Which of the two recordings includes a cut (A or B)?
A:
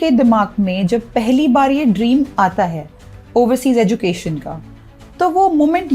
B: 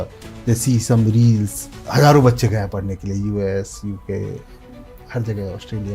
B